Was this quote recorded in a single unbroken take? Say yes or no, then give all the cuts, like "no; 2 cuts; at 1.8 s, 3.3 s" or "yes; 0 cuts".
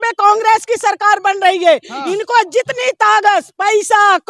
yes; 0 cuts